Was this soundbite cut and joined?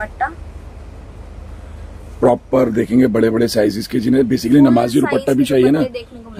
no; 0 cuts

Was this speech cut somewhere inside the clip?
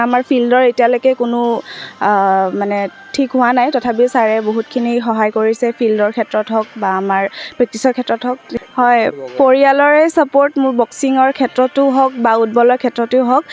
yes; 1 cut; at 8.5 s

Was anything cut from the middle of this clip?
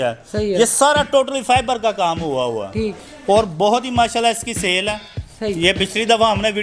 no; 0 cuts

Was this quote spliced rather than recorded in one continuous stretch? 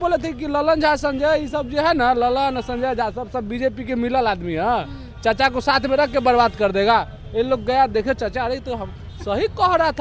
no; 0 cuts

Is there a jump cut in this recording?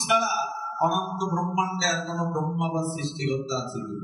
no; 0 cuts

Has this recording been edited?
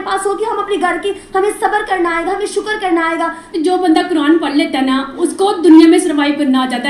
yes; 1 cut; at 3.5 s

